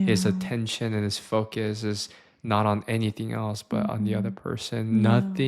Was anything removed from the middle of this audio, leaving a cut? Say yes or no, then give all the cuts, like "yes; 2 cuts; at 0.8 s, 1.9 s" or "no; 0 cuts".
no; 0 cuts